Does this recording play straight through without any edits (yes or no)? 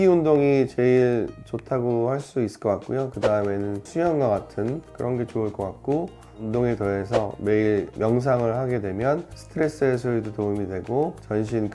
yes